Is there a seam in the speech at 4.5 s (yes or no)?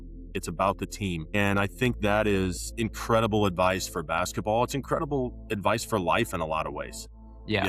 no